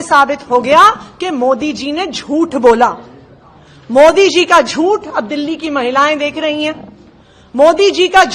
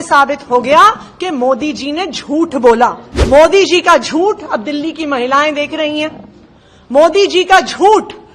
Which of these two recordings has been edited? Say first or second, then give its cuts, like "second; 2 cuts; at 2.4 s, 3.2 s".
second; 1 cut; at 3.1 s